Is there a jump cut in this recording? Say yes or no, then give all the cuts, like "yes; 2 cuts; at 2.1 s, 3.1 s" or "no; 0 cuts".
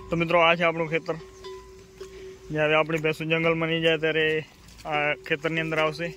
no; 0 cuts